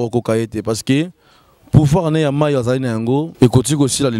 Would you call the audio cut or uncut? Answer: cut